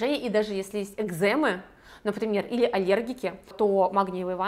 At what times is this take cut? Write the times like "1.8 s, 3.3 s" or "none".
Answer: 3.5 s